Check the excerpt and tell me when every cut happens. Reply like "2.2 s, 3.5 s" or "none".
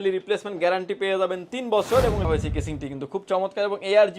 2.2 s